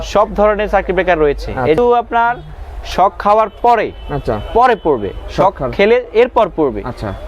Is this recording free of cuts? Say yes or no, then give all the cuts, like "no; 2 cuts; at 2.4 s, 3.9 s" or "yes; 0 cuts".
no; 1 cut; at 1.8 s